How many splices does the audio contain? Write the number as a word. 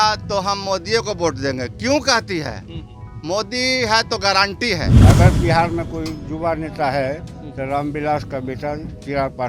one